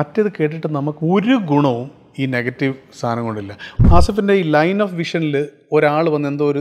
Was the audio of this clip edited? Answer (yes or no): yes